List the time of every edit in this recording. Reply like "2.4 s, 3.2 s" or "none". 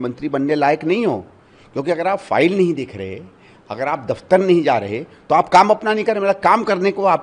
none

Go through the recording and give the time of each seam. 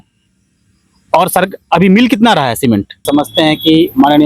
3.0 s

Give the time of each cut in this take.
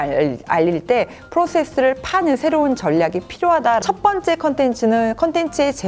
3.8 s

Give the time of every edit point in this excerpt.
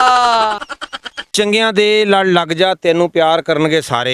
1.0 s

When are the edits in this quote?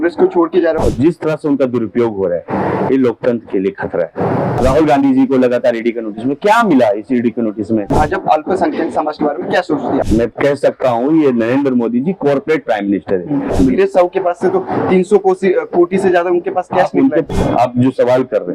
0.8 s, 4.6 s, 7.9 s, 10.1 s, 13.5 s, 17.2 s

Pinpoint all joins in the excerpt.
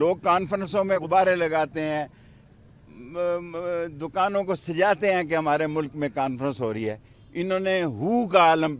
1.0 s

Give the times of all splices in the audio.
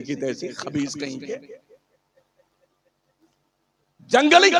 none

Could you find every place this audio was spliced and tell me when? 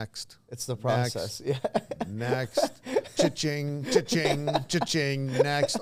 none

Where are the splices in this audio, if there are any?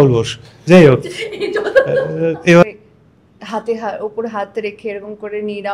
2.6 s

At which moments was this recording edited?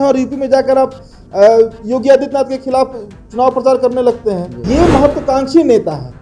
4.5 s

